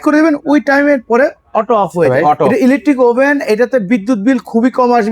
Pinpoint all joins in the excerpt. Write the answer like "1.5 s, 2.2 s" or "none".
2.5 s